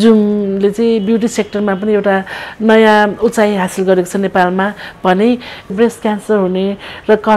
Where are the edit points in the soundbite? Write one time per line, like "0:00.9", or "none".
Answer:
0:05.7